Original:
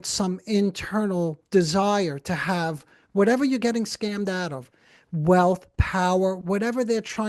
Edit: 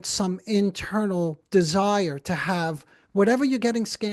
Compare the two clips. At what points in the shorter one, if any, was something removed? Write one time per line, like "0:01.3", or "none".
none